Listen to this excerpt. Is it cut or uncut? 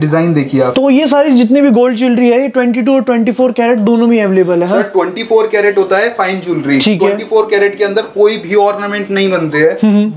uncut